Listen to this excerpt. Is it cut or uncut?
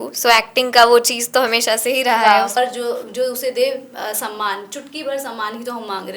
cut